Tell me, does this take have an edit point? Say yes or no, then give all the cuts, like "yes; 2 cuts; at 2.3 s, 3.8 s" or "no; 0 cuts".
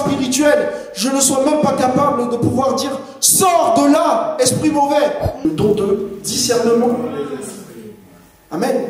yes; 1 cut; at 5.5 s